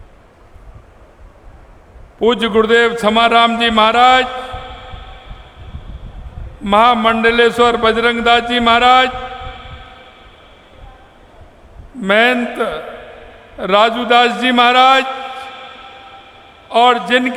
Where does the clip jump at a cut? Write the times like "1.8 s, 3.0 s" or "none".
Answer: none